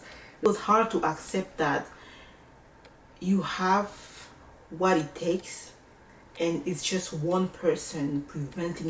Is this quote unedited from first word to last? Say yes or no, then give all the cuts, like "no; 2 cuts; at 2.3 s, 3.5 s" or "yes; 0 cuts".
yes; 0 cuts